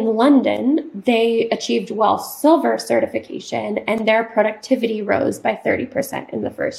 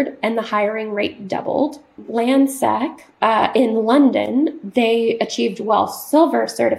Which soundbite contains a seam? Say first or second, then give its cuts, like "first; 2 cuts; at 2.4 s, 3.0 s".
second; 1 cut; at 2.0 s